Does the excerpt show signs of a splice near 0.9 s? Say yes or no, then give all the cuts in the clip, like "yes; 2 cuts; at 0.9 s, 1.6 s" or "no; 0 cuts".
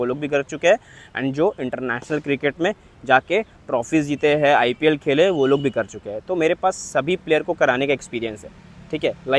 no; 0 cuts